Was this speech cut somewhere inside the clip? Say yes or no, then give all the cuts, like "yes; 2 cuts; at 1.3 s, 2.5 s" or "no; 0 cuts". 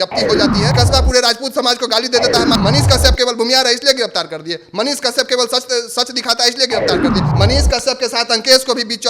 yes; 3 cuts; at 0.7 s, 2.5 s, 7.3 s